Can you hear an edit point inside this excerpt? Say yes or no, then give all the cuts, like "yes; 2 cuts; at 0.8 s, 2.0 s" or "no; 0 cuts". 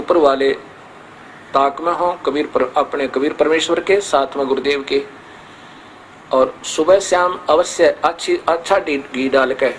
no; 0 cuts